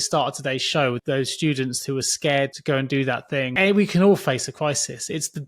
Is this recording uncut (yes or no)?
no